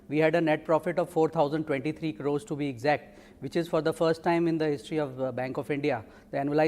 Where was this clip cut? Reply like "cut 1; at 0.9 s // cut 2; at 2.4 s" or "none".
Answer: cut 1; at 4.6 s

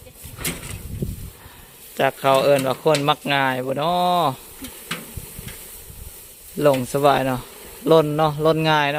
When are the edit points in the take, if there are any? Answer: none

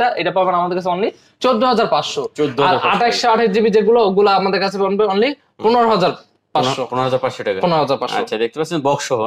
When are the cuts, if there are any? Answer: none

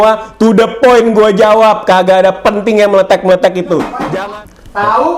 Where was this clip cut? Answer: cut 1; at 4.1 s

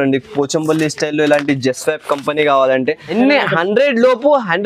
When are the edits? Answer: cut 1; at 3.1 s

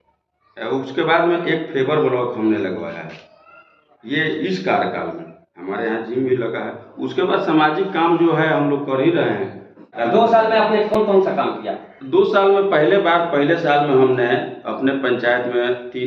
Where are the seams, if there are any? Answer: cut 1; at 9.9 s // cut 2; at 10.9 s

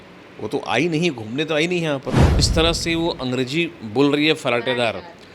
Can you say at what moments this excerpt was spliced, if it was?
cut 1; at 2.5 s

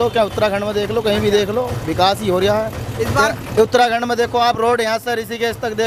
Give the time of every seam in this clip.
none

